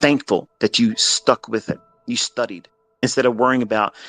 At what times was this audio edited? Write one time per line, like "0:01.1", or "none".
0:01.9
0:03.0